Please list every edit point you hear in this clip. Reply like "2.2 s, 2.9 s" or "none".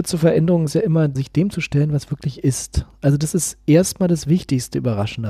1.2 s